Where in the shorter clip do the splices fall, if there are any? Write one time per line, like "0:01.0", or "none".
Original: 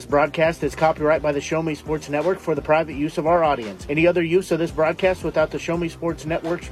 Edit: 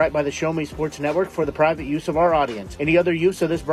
none